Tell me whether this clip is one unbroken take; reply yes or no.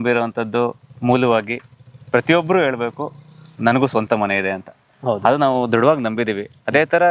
yes